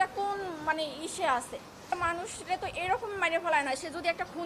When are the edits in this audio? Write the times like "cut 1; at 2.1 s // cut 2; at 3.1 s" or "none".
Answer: cut 1; at 1.8 s